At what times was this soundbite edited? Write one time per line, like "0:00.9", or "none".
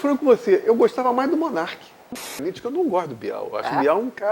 0:02.4